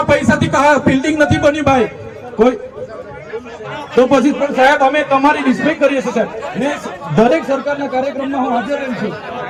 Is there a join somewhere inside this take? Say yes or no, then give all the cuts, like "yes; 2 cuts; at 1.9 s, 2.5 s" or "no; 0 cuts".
no; 0 cuts